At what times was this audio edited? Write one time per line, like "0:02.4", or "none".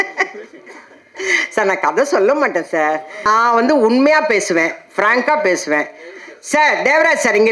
0:03.3